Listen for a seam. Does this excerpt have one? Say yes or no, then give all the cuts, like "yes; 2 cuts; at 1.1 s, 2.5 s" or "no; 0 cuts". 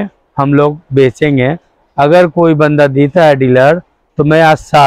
no; 0 cuts